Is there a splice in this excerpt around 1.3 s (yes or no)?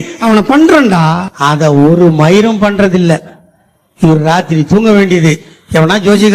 yes